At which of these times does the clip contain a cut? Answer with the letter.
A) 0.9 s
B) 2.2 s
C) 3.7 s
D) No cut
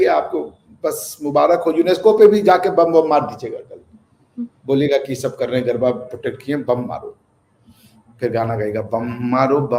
D